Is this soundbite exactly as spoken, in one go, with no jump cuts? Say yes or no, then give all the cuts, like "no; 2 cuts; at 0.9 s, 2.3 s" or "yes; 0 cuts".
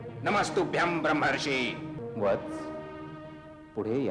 no; 1 cut; at 2.0 s